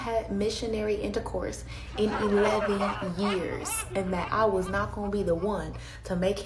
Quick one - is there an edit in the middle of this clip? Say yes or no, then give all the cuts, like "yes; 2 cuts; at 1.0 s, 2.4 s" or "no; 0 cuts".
yes; 1 cut; at 3.5 s